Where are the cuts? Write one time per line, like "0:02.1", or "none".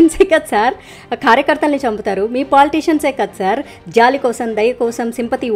none